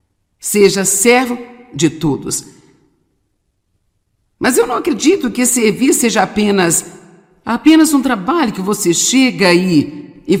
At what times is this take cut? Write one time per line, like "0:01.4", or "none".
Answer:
none